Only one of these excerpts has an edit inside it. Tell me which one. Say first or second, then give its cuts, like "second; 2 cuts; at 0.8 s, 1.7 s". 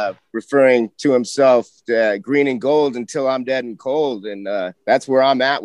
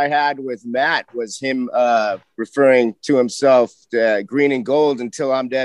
first; 1 cut; at 4.8 s